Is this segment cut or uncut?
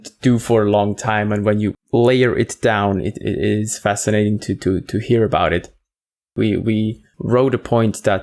cut